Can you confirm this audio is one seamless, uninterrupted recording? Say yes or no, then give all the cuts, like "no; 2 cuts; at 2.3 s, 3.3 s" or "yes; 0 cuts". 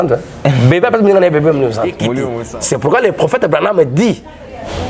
no; 1 cut; at 2.3 s